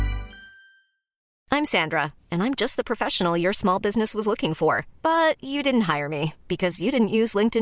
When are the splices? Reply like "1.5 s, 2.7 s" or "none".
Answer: 1.3 s